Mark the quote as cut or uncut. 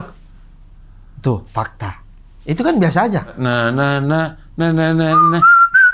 cut